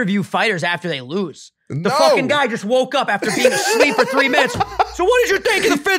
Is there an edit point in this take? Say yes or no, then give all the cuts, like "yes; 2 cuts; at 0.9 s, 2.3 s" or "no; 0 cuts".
no; 0 cuts